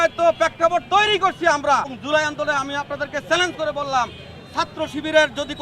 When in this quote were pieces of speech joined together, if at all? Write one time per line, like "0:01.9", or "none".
0:01.9